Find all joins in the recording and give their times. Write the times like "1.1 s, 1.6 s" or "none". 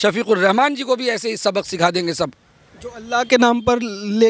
none